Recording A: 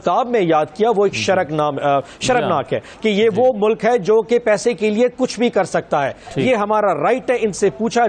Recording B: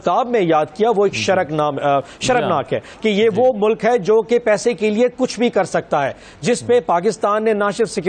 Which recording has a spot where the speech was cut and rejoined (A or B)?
A